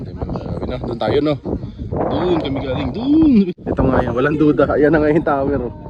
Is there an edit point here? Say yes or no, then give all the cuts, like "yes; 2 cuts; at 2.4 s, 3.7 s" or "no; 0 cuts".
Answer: yes; 1 cut; at 3.5 s